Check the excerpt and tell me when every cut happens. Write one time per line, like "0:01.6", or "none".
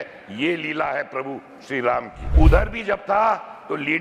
0:02.2